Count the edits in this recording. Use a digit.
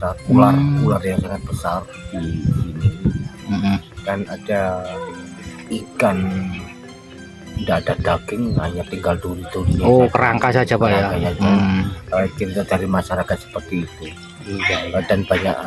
0